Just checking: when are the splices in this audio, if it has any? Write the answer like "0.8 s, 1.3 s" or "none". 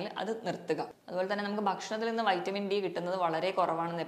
1.0 s